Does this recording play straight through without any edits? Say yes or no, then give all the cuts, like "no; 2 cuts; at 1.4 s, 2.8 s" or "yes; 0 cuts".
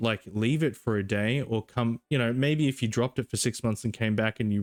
yes; 0 cuts